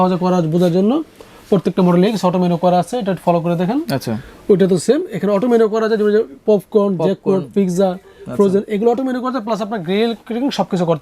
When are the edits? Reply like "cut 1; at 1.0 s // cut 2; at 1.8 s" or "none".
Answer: none